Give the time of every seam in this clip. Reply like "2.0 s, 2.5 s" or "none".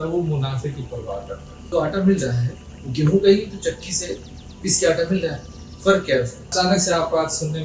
1.7 s, 6.5 s

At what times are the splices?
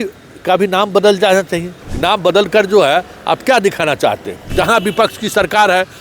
1.8 s, 4.5 s

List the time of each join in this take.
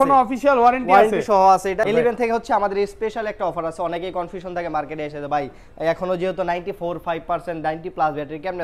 1.8 s

